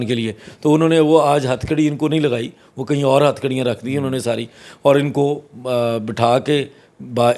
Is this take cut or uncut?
uncut